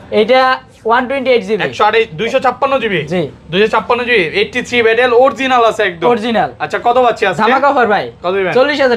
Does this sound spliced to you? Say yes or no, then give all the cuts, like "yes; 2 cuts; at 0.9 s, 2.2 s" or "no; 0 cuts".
no; 0 cuts